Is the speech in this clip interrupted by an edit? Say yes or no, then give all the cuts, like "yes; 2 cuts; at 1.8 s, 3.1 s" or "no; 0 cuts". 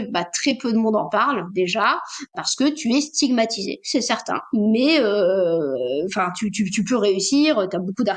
no; 0 cuts